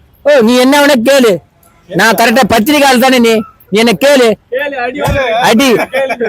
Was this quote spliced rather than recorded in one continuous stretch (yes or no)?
no